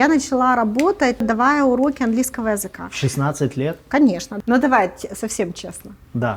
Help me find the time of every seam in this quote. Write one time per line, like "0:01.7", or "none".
0:01.2
0:04.3